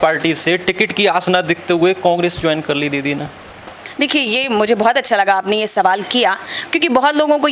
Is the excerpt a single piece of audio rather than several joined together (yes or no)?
yes